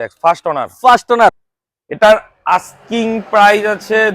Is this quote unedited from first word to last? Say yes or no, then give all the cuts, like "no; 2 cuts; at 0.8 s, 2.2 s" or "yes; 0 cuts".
no; 1 cut; at 1.4 s